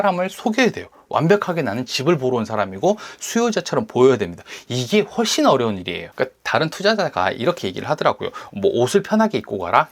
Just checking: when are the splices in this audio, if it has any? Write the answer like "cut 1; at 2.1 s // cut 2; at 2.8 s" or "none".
cut 1; at 6.0 s